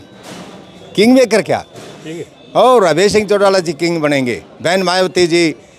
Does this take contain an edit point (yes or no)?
no